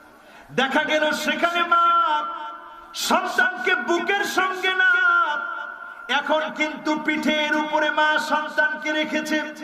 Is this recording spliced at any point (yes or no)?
no